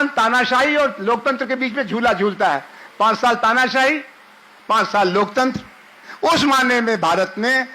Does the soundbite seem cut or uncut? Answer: cut